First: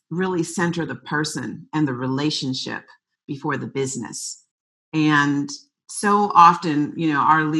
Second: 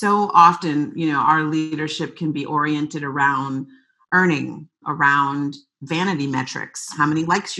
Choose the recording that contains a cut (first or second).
second